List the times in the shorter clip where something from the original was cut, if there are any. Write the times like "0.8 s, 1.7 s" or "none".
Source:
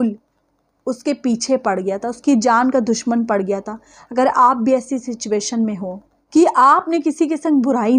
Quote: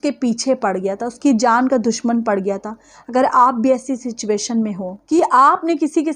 4.9 s